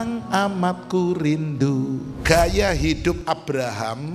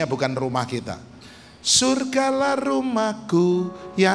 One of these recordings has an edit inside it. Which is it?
first; 1 cut; at 2.1 s

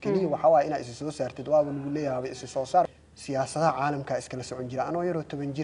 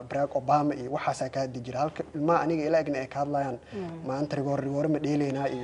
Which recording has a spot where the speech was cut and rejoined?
first; 1 cut; at 2.9 s

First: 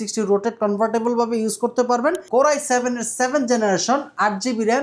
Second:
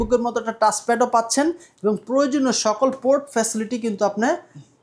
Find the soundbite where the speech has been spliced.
first; 1 cut; at 2.2 s

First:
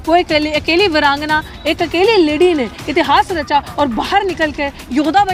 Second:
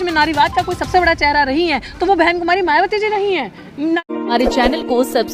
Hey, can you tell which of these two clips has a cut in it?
second; 1 cut; at 4.0 s

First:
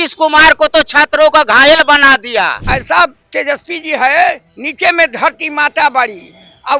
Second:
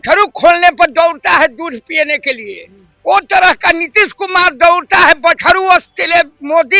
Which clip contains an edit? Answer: first; 1 cut; at 2.6 s

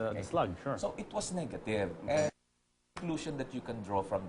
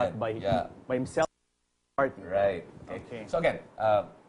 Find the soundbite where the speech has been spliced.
first; 1 cut; at 1.8 s

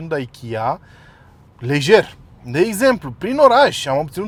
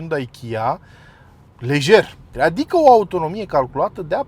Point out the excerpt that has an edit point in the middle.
second; 1 cut; at 2.3 s

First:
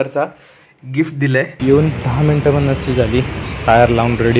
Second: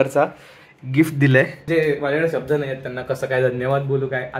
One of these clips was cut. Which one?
first; 2 cuts; at 1.5 s, 3.4 s

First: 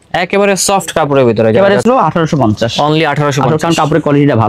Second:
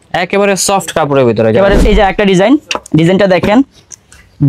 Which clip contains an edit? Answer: second; 1 cut; at 1.8 s

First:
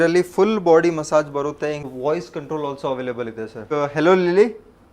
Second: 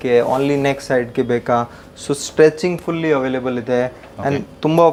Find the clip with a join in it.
first; 2 cuts; at 1.9 s, 3.6 s

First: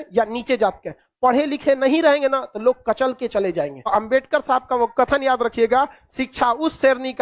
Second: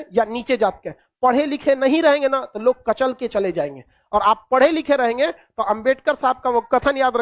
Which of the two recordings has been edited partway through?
first; 1 cut; at 3.8 s

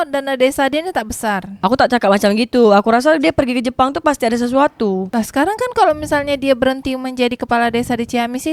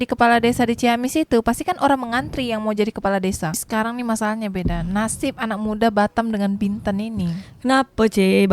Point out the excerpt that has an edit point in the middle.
second; 1 cut; at 3.5 s

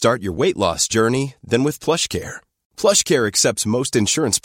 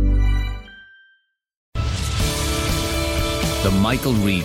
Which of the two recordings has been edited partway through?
second; 1 cut; at 1.7 s

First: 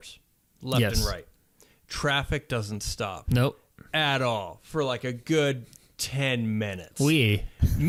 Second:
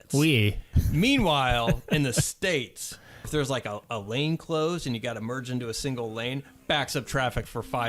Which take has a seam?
second; 1 cut; at 3.3 s

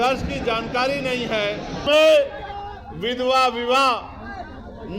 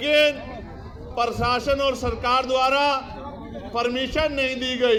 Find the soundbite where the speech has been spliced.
first; 1 cut; at 1.8 s

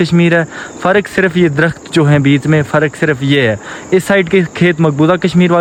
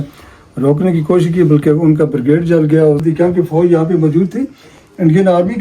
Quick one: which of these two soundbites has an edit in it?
second; 1 cut; at 3.0 s

